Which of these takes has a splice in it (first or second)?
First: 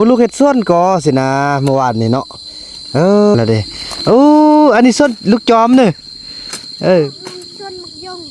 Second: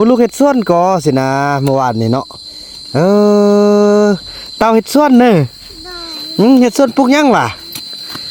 first